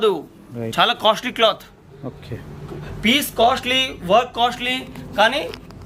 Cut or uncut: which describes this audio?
uncut